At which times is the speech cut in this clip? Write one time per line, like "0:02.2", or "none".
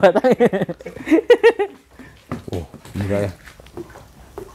none